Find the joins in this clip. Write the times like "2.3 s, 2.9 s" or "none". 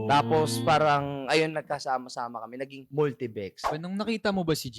3.7 s

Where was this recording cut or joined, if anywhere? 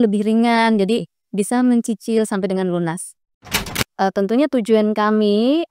3.6 s

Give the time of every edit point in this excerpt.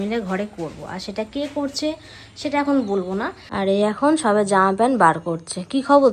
3.4 s

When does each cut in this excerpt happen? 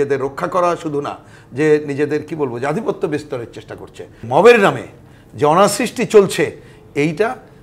4.2 s

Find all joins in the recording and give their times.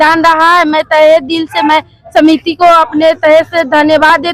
none

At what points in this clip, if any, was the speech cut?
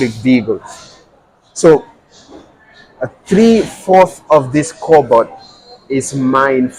none

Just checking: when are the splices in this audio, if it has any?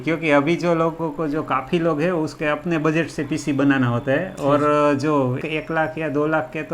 1.0 s, 2.3 s, 5.4 s

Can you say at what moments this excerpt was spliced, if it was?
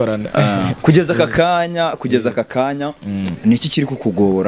none

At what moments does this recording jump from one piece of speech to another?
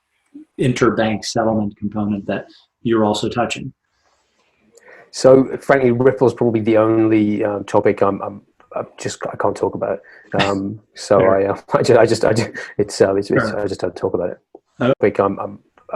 15.0 s

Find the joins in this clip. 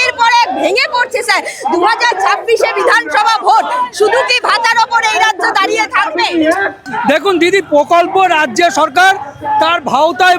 6.8 s

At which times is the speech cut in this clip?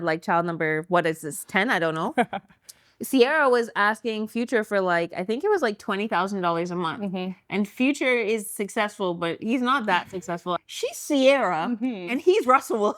10.6 s

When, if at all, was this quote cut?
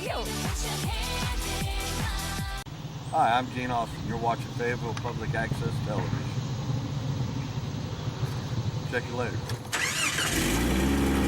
2.7 s

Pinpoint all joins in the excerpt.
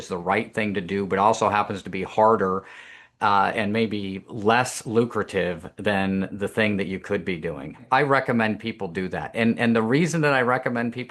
7.8 s

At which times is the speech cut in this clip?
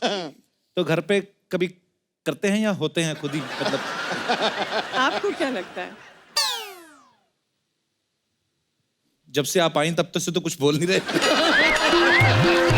none

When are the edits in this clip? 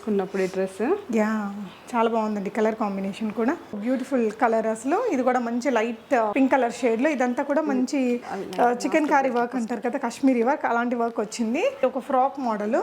3.8 s, 6.3 s, 11.8 s

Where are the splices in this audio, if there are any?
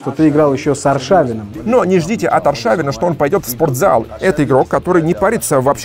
1.5 s, 4.1 s

